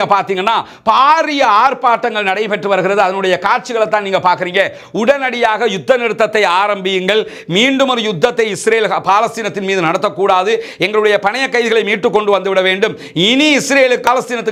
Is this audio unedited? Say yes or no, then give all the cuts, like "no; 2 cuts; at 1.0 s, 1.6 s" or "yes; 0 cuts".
yes; 0 cuts